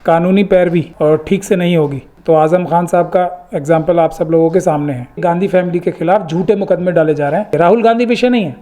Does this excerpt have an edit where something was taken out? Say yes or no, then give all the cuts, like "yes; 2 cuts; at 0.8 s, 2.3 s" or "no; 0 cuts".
yes; 4 cuts; at 0.9 s, 2.1 s, 5.2 s, 7.5 s